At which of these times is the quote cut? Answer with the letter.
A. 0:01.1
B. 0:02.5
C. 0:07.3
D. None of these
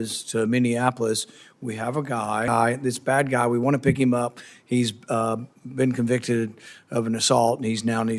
B